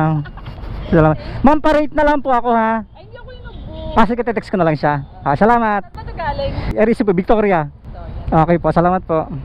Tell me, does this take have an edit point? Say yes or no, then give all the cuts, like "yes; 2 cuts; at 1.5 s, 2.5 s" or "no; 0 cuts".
no; 0 cuts